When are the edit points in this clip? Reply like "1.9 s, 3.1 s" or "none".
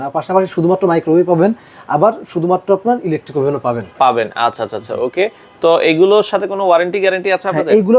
none